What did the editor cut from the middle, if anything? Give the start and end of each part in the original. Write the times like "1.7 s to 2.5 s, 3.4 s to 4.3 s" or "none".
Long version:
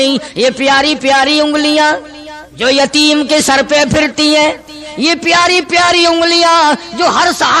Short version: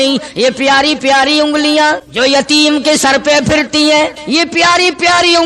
2.1 s to 2.5 s, 4.6 s to 4.9 s